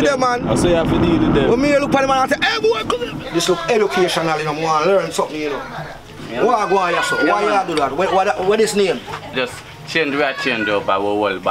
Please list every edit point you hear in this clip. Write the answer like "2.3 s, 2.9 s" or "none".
3.1 s, 9.3 s